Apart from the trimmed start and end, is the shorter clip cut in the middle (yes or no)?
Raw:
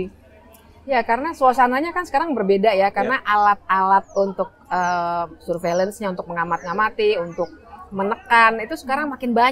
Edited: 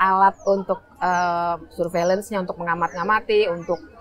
no